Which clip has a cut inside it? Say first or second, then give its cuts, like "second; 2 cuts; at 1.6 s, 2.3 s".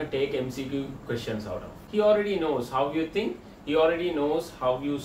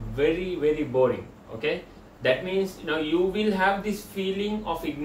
first; 1 cut; at 1.7 s